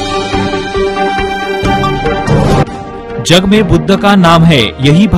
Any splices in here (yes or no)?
yes